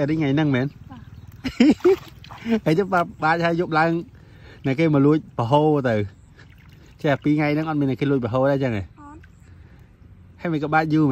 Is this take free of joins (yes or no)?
yes